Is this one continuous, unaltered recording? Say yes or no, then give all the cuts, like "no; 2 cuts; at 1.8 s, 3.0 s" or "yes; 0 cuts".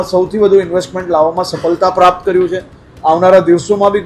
yes; 0 cuts